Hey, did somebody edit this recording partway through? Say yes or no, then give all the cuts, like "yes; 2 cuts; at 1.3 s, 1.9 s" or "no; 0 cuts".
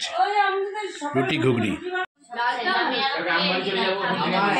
yes; 1 cut; at 2.1 s